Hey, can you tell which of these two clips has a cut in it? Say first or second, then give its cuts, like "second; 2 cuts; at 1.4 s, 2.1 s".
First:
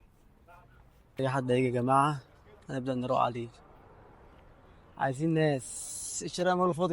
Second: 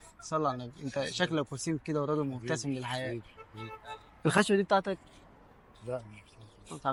first; 1 cut; at 1.1 s